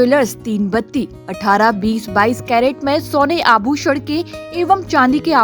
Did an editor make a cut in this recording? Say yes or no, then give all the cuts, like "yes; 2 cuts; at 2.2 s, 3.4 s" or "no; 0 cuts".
no; 0 cuts